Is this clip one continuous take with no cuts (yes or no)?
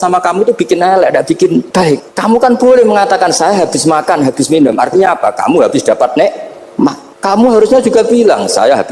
no